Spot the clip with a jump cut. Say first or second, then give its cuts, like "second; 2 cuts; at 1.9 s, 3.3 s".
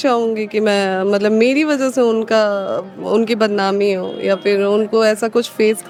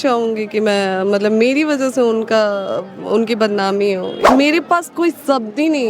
second; 1 cut; at 4.1 s